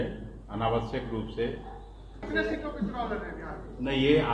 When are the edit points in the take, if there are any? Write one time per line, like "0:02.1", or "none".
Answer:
0:02.3